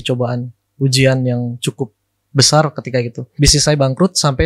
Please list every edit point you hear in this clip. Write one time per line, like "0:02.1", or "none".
0:03.2